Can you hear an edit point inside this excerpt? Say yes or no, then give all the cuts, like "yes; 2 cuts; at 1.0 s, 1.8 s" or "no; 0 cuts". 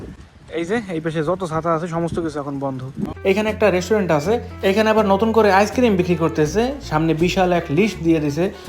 yes; 1 cut; at 3.1 s